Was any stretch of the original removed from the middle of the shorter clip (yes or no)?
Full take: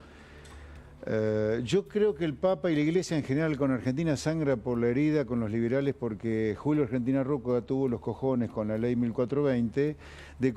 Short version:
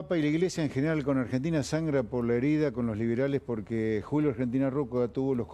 no